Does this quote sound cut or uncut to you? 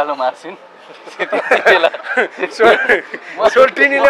uncut